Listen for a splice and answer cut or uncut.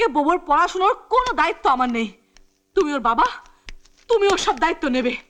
uncut